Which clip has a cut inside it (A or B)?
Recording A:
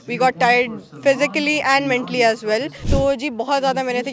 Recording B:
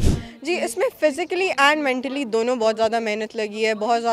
A